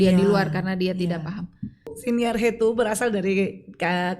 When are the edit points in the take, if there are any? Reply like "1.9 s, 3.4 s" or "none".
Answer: 2.0 s